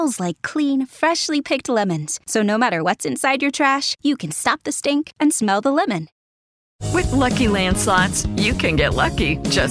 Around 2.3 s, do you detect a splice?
no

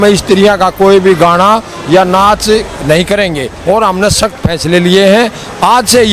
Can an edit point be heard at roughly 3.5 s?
yes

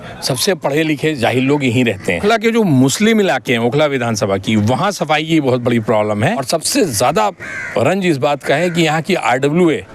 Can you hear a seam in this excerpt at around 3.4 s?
no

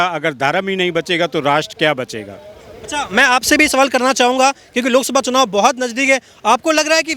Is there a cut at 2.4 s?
no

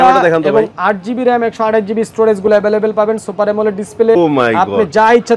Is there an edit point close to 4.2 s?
yes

